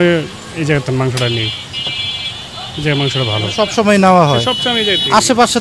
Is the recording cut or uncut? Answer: uncut